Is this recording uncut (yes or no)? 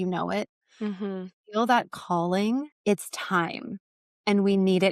no